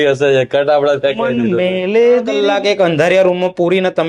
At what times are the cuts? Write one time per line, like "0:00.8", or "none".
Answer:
0:02.4